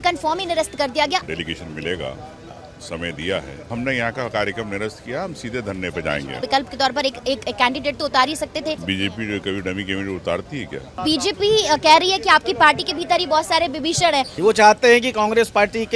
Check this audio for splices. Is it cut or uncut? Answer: cut